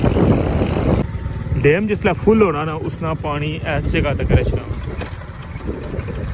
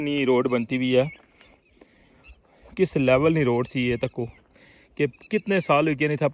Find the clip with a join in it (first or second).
first